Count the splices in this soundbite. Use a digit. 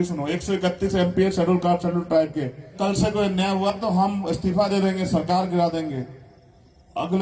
1